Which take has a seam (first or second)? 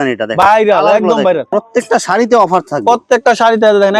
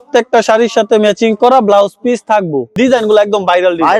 first